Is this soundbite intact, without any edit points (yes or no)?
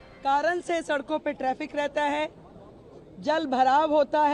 yes